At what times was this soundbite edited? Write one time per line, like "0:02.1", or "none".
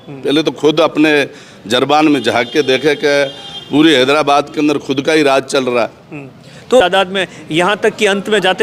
0:06.8